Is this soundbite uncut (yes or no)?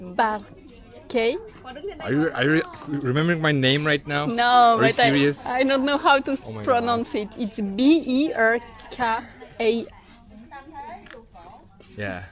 yes